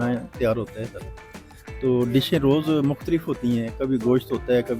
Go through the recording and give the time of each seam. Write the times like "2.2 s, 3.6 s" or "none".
none